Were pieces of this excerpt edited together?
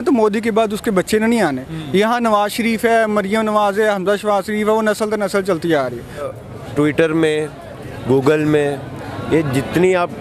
yes; 1 cut; at 6.3 s

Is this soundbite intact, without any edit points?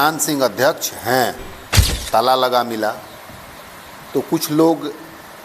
no; 1 cut; at 1.9 s

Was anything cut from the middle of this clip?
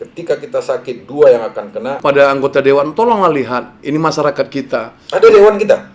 yes; 1 cut; at 2.0 s

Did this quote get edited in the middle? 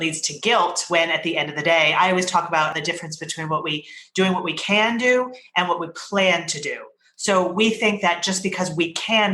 yes; 1 cut; at 2.7 s

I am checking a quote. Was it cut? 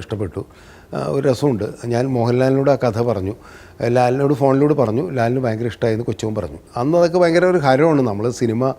yes; 1 cut; at 6.6 s

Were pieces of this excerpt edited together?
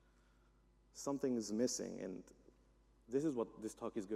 no; 0 cuts

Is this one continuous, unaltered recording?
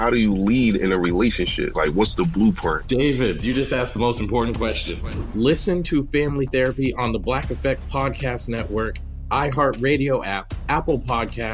yes; 0 cuts

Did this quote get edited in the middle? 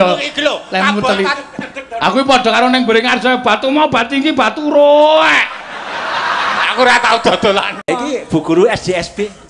yes; 1 cut; at 7.8 s

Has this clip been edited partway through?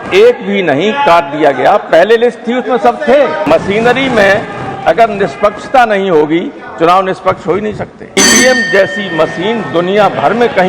yes; 2 cuts; at 3.5 s, 8.2 s

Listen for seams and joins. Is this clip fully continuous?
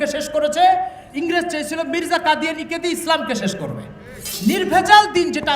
no; 2 cuts; at 1.0 s, 4.2 s

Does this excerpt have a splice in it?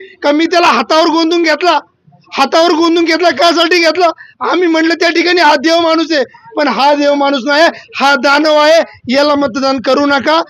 no; 0 cuts

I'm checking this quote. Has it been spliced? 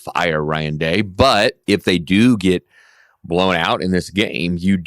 yes; 1 cut; at 1.6 s

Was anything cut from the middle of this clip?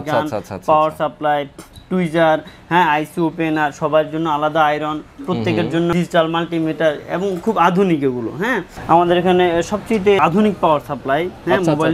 yes; 2 cuts; at 5.9 s, 8.7 s

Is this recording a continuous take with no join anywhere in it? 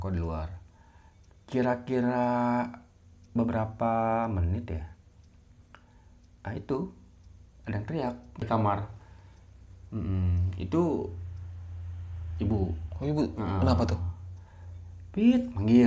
no; 1 cut; at 8.4 s

